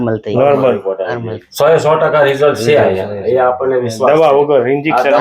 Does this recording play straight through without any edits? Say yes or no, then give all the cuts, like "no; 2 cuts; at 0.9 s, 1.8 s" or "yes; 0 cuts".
no; 1 cut; at 1.3 s